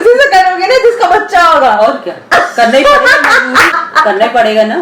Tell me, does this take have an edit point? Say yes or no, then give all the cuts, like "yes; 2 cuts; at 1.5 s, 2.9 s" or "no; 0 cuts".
yes; 1 cut; at 3.7 s